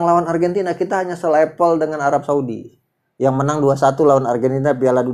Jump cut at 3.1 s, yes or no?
no